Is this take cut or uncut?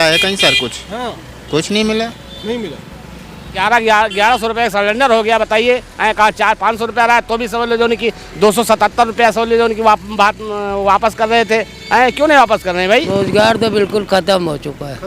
cut